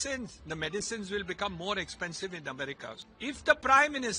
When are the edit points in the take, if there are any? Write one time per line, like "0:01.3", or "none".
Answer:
0:03.0